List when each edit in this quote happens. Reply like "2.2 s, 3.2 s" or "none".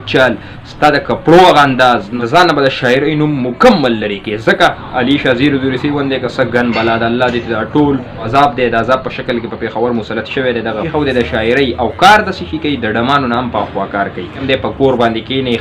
2.1 s, 4.9 s, 8.2 s, 10.8 s, 14.4 s